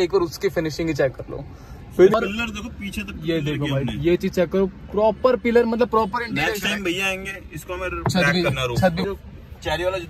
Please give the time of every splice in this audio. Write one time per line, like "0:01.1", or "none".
0:02.1
0:09.1